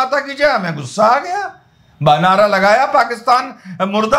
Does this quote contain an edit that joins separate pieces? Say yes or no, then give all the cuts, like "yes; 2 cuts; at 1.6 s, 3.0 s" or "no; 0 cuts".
no; 0 cuts